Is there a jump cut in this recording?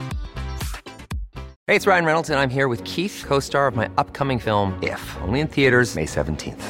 yes; 1 cut; at 1.4 s

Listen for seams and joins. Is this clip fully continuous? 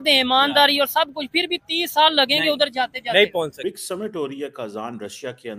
no; 1 cut; at 3.7 s

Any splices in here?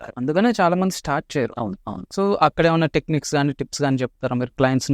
no; 0 cuts

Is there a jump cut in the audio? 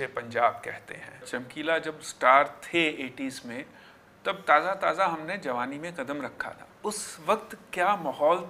yes; 2 cuts; at 1.2 s, 6.7 s

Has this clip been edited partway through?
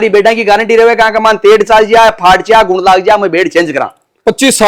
no; 0 cuts

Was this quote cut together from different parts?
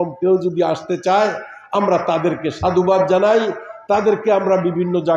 no; 0 cuts

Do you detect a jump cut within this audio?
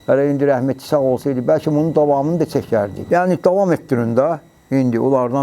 yes; 1 cut; at 3.0 s

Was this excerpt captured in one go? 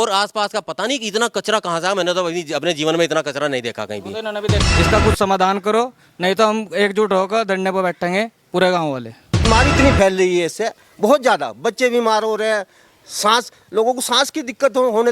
no; 2 cuts; at 4.6 s, 9.5 s

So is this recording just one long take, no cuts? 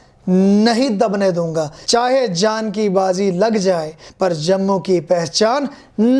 no; 2 cuts; at 1.7 s, 4.1 s

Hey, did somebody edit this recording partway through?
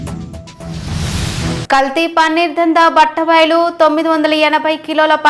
no; 0 cuts

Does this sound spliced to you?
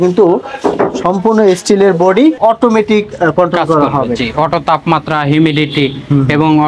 yes; 1 cut; at 2.4 s

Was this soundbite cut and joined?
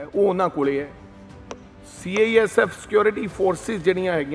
no; 0 cuts

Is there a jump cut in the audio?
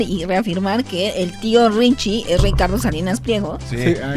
no; 0 cuts

